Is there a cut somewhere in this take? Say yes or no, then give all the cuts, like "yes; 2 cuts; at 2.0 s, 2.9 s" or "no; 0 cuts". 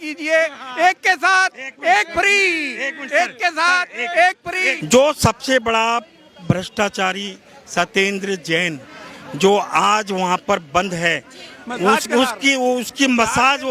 yes; 1 cut; at 4.8 s